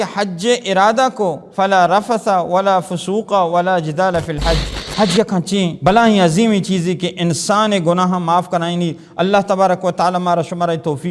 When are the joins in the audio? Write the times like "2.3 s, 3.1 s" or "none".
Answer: 1.4 s, 4.8 s, 5.8 s